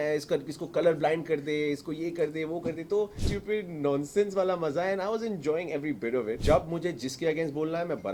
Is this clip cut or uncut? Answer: cut